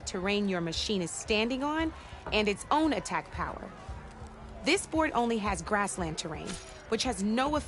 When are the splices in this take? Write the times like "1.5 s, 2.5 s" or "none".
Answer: none

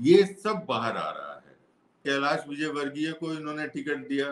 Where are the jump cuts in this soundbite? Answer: 2.0 s

